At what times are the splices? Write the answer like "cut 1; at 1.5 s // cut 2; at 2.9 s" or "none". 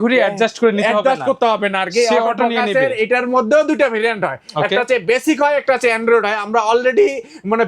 none